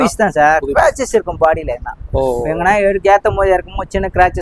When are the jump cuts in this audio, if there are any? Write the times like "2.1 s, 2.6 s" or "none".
none